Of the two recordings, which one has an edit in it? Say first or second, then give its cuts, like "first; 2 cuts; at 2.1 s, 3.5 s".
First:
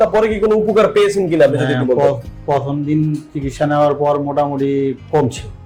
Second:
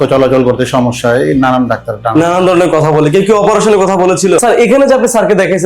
second; 1 cut; at 4.4 s